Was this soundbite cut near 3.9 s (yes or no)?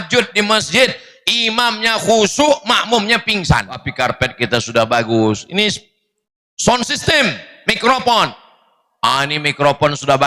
yes